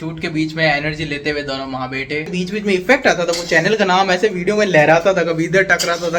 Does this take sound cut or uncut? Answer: cut